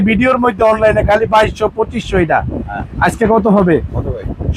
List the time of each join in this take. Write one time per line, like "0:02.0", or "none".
none